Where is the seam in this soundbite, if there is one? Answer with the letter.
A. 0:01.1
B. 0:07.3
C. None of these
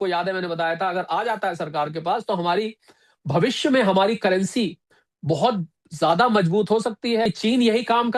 B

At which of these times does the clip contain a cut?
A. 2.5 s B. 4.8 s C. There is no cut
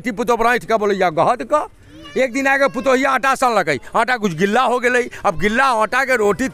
C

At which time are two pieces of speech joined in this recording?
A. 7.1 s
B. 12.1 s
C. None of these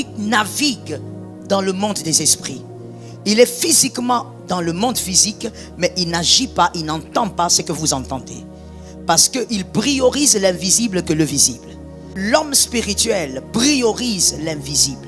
B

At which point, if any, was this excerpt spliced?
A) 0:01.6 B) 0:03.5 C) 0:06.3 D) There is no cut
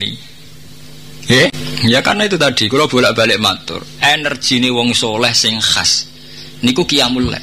A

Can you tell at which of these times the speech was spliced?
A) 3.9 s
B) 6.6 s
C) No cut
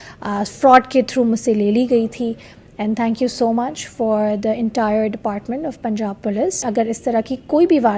B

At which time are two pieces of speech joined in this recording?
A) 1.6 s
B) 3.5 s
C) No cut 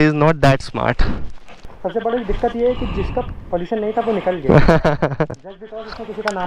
A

